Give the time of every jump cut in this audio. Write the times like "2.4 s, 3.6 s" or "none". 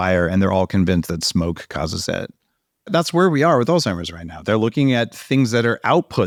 none